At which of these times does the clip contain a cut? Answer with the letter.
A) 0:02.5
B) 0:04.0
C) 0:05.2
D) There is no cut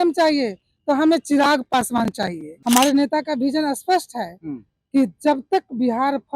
A